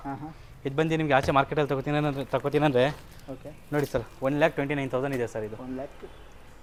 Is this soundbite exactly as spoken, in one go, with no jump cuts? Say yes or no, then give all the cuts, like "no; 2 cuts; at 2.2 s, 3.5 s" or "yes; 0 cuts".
yes; 0 cuts